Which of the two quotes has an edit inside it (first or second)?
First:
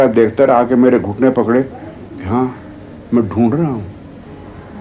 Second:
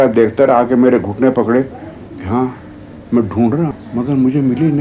second